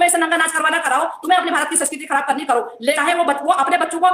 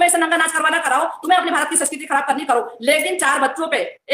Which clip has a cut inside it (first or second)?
first